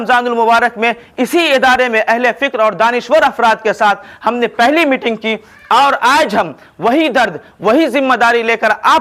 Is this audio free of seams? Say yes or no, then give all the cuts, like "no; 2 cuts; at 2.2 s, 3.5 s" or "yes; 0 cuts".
yes; 0 cuts